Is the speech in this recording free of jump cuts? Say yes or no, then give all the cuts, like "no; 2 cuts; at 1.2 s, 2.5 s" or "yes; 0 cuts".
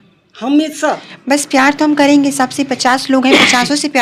yes; 0 cuts